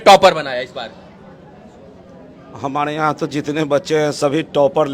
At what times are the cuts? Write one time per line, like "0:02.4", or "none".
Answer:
none